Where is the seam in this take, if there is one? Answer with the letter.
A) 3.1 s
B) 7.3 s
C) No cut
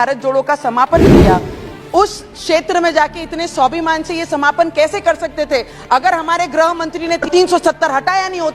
B